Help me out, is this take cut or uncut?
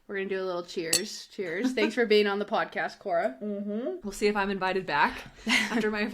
cut